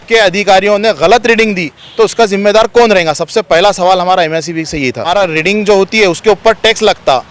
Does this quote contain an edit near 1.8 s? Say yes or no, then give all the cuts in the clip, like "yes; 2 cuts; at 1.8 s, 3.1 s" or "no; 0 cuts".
no; 1 cut; at 5.0 s